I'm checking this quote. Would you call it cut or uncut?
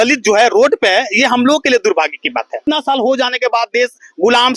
cut